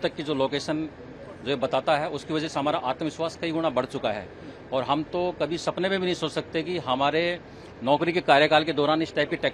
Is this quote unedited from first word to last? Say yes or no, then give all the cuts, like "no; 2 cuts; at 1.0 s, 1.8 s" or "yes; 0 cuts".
yes; 0 cuts